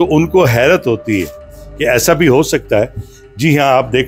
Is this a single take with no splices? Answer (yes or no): yes